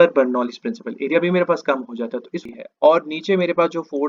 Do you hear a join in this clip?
yes; 1 cut; at 2.5 s

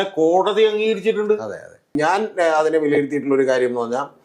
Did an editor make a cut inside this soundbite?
yes; 1 cut; at 2.0 s

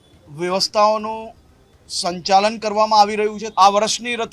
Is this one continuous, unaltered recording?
no; 1 cut; at 3.4 s

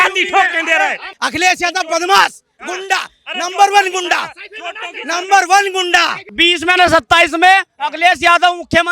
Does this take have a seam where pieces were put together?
yes; 2 cuts; at 1.1 s, 6.3 s

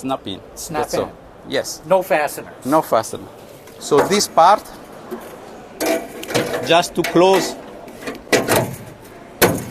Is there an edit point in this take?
yes; 1 cut; at 3.7 s

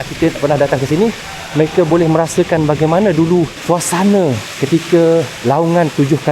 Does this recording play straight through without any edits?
no; 3 cuts; at 3.6 s, 4.5 s, 5.3 s

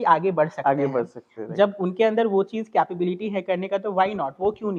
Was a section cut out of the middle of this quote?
no; 0 cuts

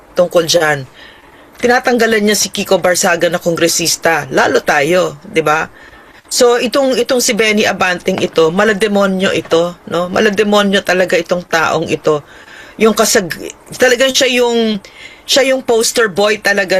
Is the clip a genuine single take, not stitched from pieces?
yes; 0 cuts

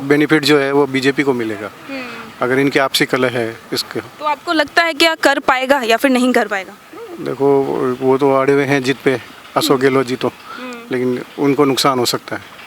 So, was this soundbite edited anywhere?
no; 0 cuts

